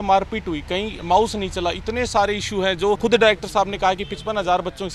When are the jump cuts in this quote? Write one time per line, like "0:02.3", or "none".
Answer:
0:00.9
0:03.0

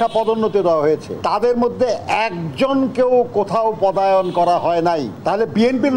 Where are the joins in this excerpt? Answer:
0:01.1
0:05.1

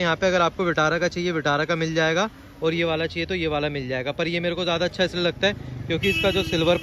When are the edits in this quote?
none

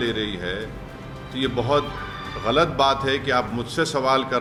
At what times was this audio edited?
none

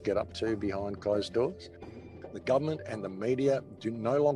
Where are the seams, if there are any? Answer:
0:01.9

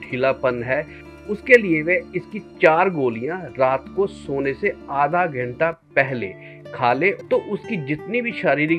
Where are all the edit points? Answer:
0:07.2

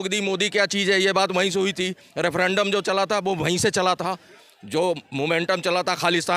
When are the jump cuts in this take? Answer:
none

